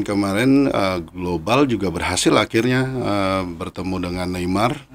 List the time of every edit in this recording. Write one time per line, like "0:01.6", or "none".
none

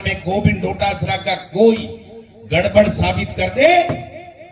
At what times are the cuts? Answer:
none

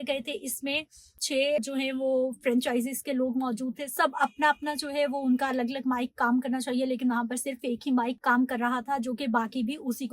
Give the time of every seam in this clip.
0:01.6
0:08.2

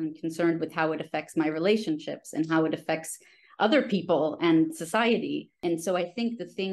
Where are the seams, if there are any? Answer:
0:05.6

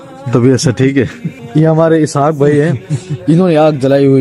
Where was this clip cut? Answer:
0:01.3

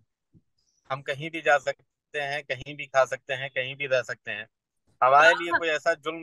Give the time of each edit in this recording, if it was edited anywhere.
none

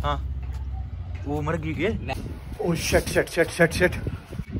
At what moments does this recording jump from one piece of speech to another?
0:02.1

